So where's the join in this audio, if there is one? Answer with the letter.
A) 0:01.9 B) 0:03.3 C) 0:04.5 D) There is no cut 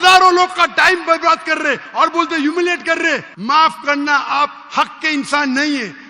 B